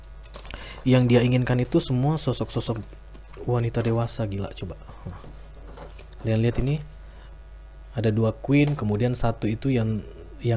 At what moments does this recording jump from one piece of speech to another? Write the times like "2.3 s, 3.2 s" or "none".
none